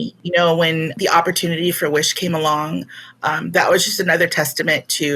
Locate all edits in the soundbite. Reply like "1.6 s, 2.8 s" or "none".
0.9 s